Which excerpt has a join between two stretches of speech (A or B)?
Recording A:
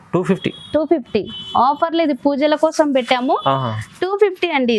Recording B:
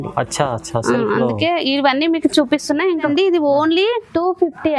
B